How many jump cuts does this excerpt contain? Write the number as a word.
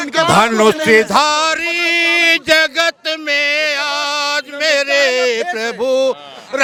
zero